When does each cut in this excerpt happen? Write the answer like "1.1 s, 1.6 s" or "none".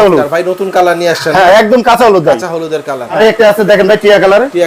3.2 s